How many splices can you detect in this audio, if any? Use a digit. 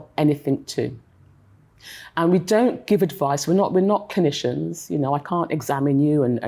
0